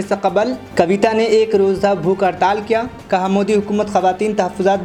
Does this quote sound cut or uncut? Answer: uncut